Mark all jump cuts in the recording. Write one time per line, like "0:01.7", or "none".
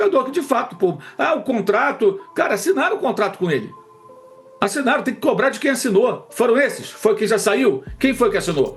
none